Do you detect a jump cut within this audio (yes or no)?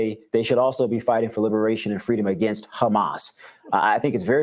no